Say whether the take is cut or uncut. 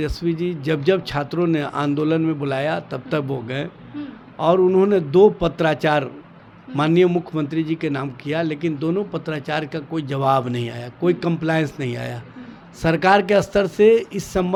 uncut